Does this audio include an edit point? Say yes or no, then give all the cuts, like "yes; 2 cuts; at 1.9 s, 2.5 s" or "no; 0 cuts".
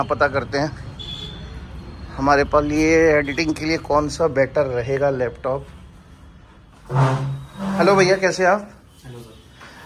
no; 0 cuts